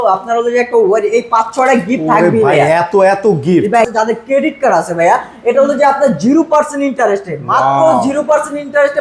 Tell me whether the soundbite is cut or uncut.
cut